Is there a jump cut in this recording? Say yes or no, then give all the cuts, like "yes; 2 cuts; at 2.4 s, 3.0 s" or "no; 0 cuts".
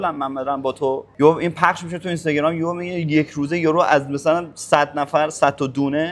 no; 0 cuts